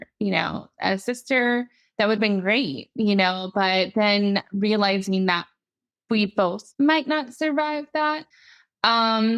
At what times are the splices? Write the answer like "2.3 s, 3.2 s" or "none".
6.6 s, 8.3 s

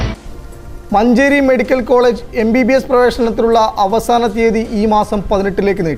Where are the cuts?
none

